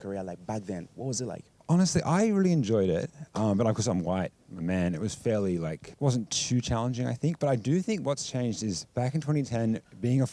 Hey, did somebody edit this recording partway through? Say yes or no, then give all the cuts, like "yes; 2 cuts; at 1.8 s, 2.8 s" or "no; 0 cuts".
no; 0 cuts